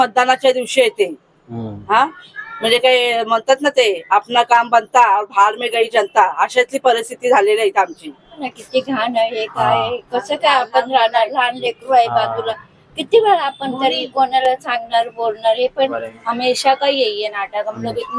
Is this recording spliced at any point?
yes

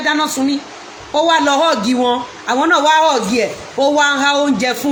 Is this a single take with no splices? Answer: yes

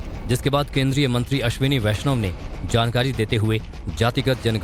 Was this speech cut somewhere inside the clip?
no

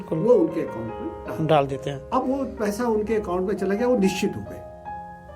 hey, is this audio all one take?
yes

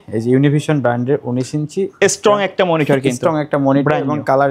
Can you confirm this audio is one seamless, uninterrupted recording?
yes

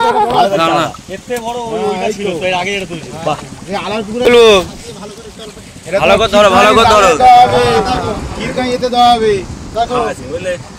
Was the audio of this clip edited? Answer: yes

